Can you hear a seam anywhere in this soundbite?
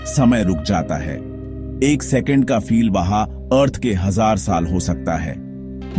yes; 1 cut; at 2.7 s

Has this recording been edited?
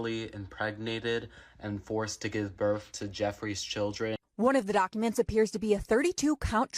yes; 1 cut; at 4.2 s

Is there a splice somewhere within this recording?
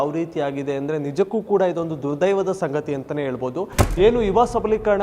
yes; 1 cut; at 3.8 s

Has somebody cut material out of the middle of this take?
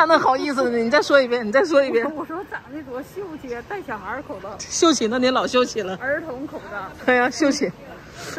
no; 0 cuts

